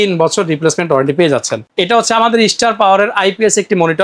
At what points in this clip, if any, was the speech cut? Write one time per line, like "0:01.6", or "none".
0:01.7